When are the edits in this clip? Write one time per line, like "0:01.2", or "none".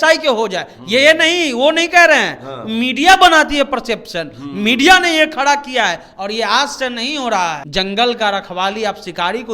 0:07.6